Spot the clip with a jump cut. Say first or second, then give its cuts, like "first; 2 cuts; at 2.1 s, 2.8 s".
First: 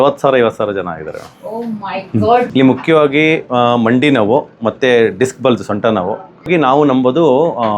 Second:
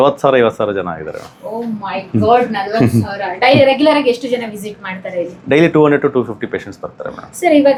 first; 2 cuts; at 2.5 s, 6.5 s